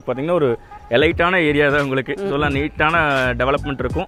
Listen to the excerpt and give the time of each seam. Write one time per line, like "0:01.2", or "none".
none